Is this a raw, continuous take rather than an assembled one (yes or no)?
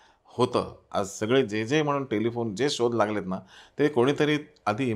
yes